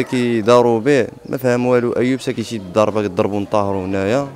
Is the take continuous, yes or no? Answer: yes